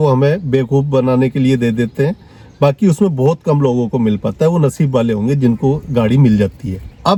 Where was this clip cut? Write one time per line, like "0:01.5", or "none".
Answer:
none